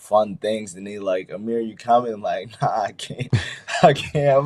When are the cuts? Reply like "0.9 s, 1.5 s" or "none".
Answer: none